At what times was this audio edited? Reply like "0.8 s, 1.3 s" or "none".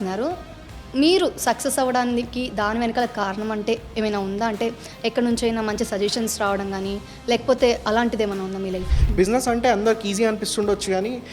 8.8 s